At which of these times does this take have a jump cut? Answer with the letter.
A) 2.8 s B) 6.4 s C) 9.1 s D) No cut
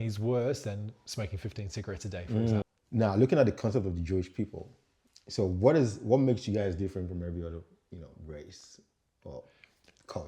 A